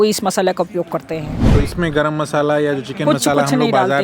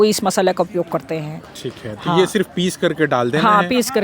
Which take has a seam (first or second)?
first